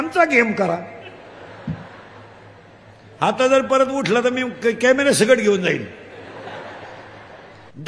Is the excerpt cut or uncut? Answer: uncut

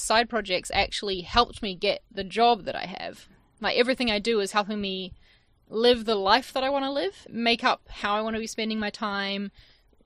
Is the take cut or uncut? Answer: cut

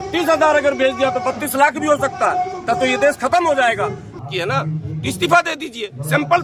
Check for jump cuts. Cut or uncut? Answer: cut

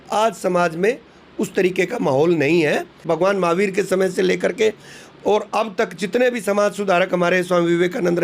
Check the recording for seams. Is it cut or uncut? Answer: cut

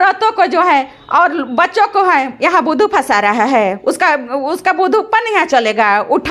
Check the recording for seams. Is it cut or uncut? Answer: uncut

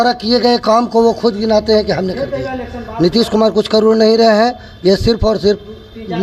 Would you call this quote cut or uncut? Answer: uncut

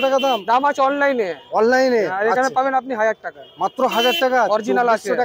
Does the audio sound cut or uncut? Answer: uncut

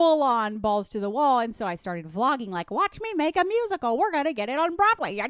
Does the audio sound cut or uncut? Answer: uncut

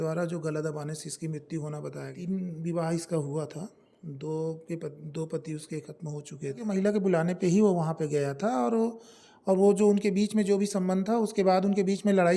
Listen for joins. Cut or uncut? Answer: cut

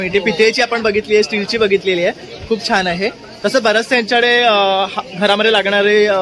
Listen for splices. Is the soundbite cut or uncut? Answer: uncut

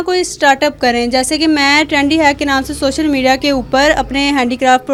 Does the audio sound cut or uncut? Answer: uncut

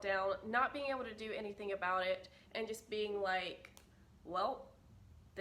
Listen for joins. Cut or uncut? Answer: uncut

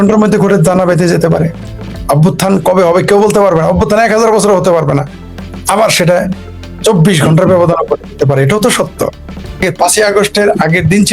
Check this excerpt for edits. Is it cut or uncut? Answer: cut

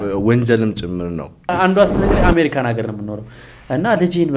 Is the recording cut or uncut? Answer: cut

